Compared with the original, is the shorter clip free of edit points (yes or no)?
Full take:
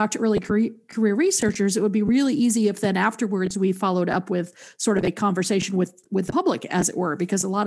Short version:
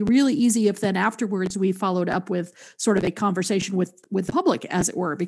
yes